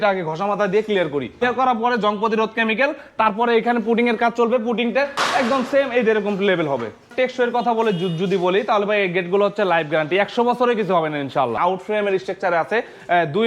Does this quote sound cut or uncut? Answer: cut